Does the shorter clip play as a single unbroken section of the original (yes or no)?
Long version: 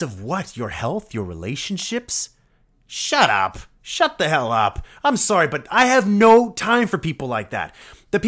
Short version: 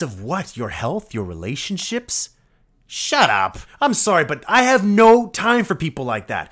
no